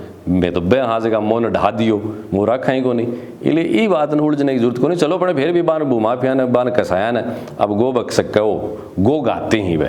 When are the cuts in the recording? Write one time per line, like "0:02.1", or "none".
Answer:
none